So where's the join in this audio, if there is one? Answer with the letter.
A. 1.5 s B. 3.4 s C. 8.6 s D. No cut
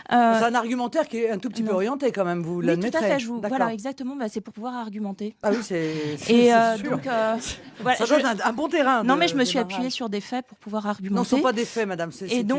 A